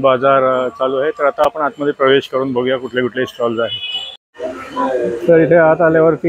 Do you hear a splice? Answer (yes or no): no